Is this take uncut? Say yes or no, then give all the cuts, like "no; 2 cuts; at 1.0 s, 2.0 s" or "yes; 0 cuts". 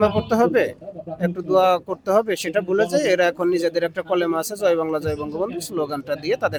yes; 0 cuts